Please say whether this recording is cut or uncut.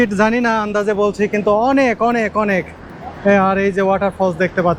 uncut